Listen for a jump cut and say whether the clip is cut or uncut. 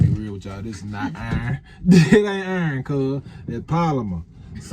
uncut